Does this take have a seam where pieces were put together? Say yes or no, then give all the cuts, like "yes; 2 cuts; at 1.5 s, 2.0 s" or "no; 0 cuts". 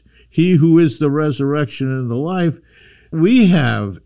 yes; 1 cut; at 3.1 s